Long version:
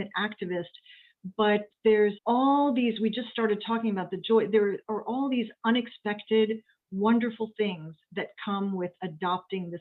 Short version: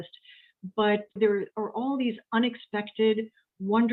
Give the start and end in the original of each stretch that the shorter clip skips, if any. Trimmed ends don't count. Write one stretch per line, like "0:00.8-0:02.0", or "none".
0:01.8-0:04.5